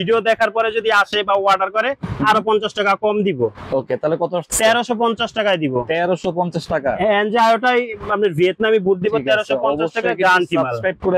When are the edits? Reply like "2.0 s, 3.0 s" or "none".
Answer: none